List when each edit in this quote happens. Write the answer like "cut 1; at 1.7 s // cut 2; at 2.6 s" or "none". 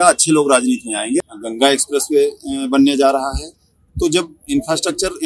cut 1; at 1.3 s

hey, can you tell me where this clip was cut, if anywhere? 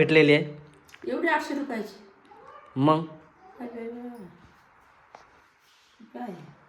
none

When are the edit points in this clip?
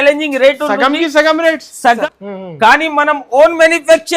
cut 1; at 2.0 s

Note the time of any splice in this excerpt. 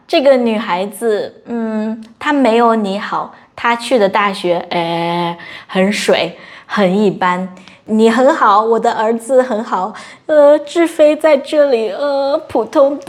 none

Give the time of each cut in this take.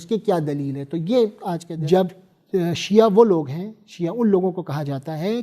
cut 1; at 1.7 s

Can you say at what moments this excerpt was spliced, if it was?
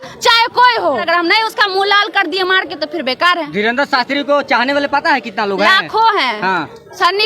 cut 1; at 1.0 s

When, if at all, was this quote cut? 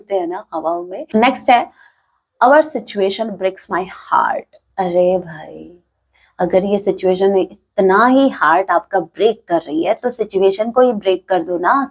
cut 1; at 0.9 s

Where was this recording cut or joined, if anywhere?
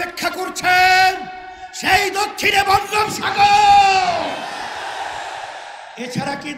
none

